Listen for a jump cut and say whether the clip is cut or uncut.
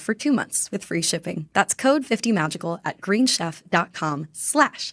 uncut